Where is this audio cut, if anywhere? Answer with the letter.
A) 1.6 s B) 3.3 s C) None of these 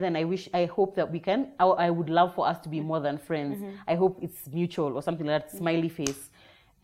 C